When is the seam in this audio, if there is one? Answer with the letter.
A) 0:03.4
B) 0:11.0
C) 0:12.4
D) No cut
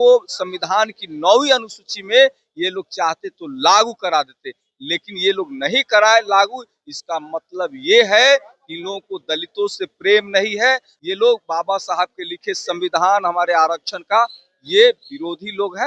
B